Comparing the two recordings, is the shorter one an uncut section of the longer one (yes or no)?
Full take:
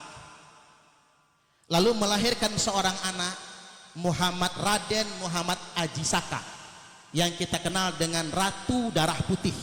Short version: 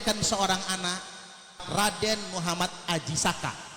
no